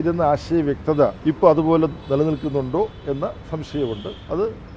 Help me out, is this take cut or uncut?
cut